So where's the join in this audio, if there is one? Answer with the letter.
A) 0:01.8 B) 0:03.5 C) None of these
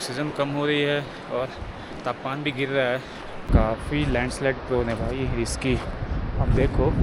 B